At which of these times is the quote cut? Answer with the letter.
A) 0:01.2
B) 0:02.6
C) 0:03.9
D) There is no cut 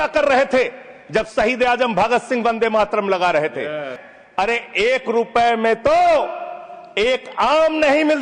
C